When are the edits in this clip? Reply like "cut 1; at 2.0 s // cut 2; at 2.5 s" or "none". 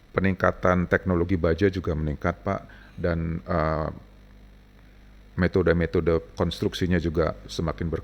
none